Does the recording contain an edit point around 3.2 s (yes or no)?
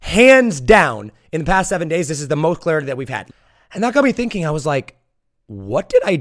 yes